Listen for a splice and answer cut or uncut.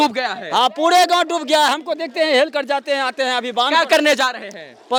uncut